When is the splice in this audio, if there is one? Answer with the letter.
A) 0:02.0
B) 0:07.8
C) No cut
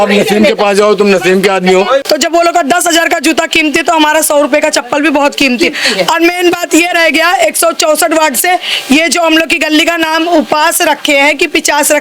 A